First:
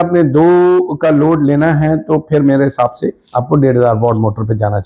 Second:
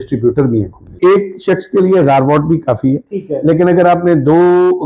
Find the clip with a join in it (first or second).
second